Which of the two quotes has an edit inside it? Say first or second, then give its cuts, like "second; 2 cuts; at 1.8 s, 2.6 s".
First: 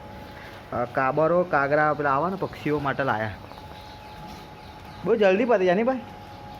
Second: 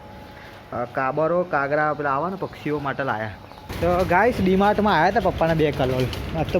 second; 1 cut; at 3.7 s